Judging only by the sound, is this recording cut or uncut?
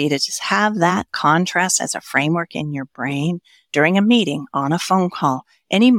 uncut